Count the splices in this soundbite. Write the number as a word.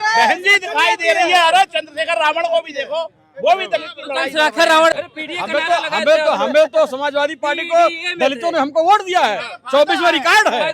one